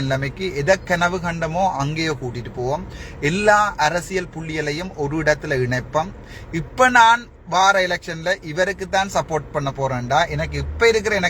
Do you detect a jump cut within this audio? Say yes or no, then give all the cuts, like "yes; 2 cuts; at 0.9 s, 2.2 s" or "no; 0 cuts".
no; 0 cuts